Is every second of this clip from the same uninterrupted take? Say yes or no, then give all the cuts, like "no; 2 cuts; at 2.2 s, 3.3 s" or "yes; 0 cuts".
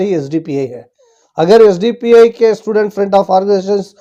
yes; 0 cuts